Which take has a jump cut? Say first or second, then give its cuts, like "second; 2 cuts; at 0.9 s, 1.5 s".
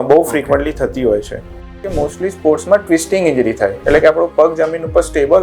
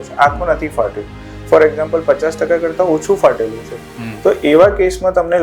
first; 1 cut; at 1.8 s